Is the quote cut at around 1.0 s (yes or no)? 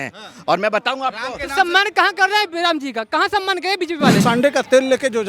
no